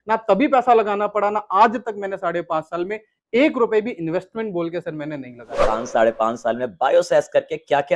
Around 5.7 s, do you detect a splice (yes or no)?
yes